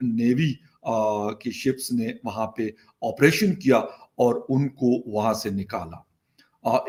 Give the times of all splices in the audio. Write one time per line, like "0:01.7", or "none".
none